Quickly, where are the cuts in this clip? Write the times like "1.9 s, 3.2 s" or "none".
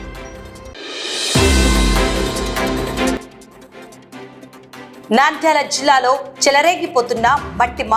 0.7 s, 3.2 s, 5.0 s